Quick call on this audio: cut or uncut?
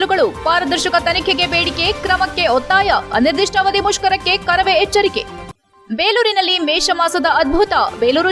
uncut